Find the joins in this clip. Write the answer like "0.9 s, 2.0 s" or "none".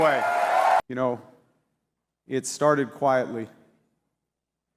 0.9 s

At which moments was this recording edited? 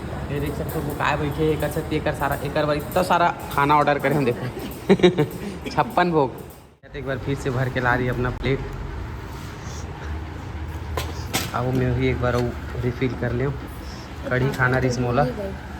7.0 s

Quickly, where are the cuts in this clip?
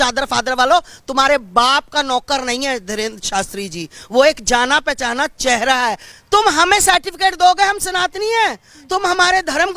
6.1 s

